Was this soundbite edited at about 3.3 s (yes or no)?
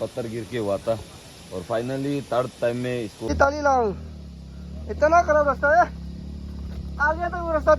yes